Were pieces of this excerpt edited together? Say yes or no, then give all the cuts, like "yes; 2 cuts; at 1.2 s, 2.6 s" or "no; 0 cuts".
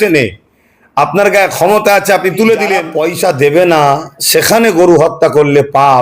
yes; 1 cut; at 2.9 s